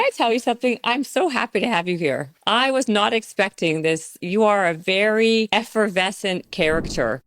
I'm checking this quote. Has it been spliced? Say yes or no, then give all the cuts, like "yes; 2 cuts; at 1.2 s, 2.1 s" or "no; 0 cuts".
yes; 3 cuts; at 2.3 s, 4.2 s, 5.5 s